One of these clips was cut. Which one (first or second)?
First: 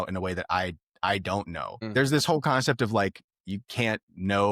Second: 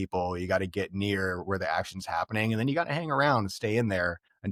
first